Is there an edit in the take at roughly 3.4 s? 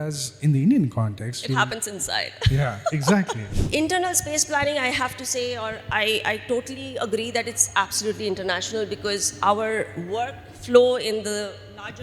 yes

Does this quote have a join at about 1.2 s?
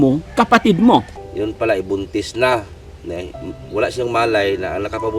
yes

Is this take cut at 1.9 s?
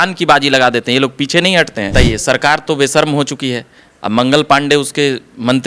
yes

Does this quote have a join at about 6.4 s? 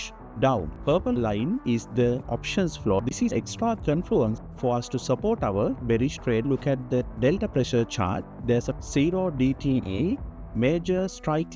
yes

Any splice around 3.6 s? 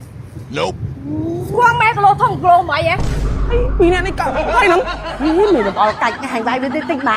no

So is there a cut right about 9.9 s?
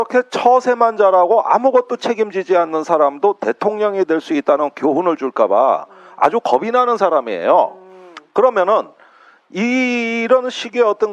yes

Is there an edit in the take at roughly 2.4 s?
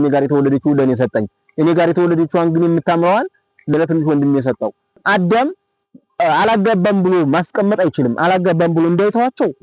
no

